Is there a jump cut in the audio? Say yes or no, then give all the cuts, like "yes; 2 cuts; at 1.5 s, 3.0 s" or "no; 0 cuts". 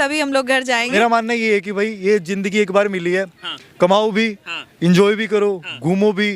yes; 1 cut; at 0.9 s